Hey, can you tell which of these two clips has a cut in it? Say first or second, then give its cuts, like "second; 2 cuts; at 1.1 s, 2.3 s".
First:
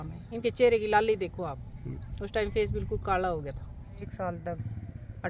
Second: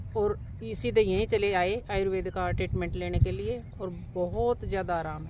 first; 1 cut; at 4.1 s